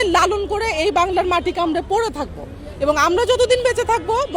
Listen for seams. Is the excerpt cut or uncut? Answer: uncut